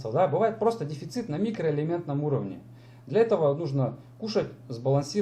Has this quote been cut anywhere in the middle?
no; 0 cuts

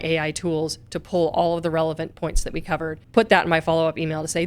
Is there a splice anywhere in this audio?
yes; 1 cut; at 3.0 s

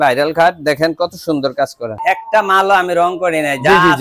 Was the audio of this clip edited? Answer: yes; 1 cut; at 2.0 s

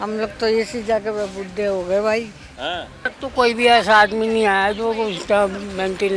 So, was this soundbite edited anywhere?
yes; 1 cut; at 3.2 s

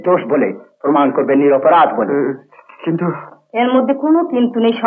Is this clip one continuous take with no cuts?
yes; 0 cuts

